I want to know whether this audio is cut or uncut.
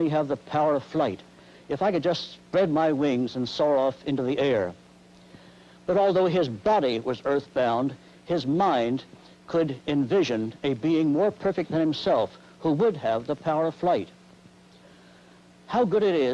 cut